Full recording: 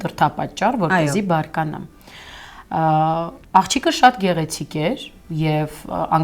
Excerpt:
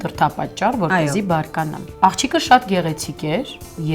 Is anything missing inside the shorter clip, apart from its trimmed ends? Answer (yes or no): yes